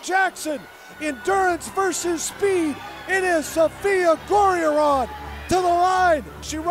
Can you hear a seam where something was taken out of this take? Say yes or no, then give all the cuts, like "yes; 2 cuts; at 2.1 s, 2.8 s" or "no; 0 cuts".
no; 0 cuts